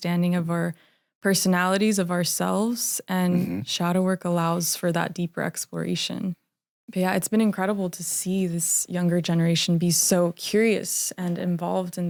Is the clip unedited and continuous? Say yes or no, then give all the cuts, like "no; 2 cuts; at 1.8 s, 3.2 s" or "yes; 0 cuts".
yes; 0 cuts